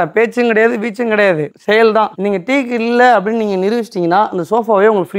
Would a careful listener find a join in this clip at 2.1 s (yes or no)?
yes